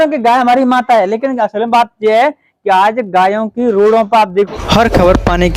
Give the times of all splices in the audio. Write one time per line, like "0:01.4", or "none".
0:04.5